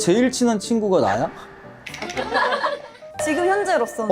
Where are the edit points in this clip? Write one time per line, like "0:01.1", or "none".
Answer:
0:03.1